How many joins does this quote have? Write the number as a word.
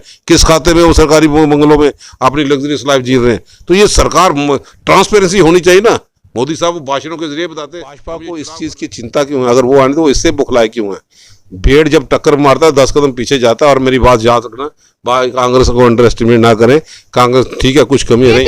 one